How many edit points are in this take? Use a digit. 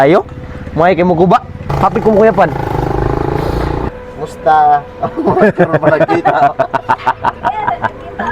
1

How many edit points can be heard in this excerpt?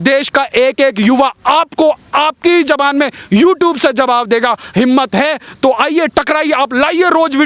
1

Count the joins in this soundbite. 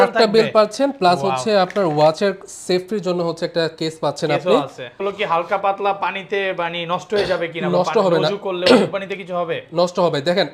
1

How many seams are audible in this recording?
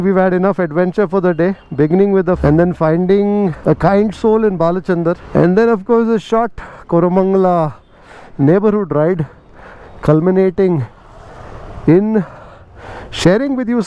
3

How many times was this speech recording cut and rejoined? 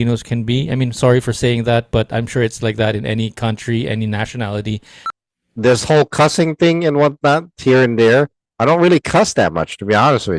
1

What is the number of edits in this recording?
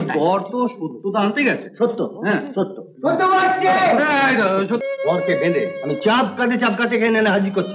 1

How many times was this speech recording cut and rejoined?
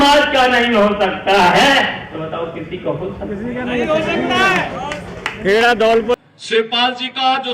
1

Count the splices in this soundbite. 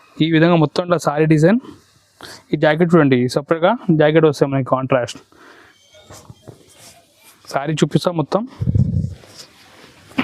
0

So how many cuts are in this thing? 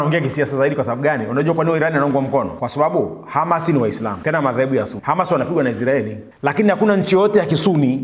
4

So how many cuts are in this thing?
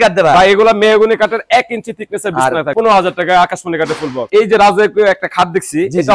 2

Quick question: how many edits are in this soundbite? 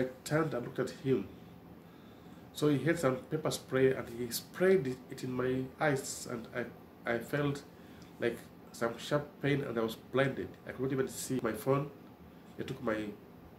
1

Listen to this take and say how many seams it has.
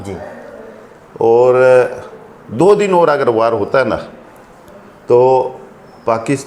0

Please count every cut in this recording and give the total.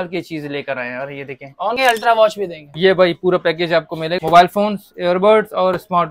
2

